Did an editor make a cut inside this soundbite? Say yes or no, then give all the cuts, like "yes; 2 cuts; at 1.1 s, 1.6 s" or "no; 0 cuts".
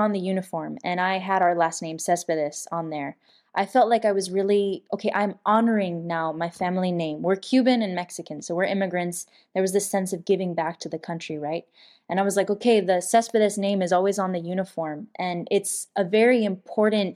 yes; 1 cut; at 4.9 s